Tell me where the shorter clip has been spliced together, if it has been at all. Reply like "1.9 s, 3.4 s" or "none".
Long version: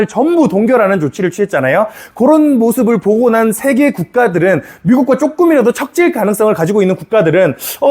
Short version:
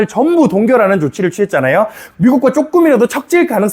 2.0 s